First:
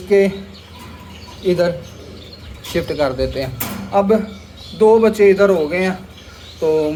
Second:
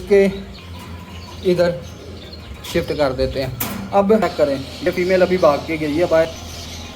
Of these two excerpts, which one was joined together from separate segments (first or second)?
second